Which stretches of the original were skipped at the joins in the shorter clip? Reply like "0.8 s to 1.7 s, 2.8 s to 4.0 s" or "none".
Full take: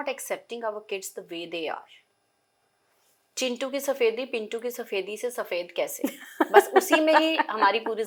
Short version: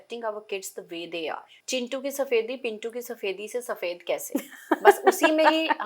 1.9 s to 3.2 s